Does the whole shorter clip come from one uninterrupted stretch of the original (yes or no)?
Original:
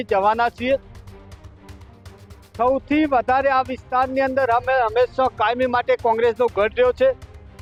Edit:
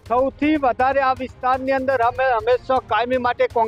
yes